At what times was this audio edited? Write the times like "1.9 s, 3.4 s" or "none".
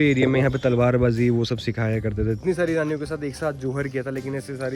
2.4 s